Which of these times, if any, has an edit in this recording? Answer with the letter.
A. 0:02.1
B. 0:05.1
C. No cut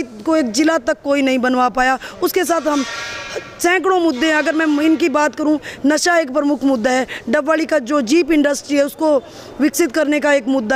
C